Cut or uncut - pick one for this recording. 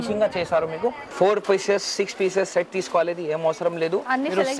cut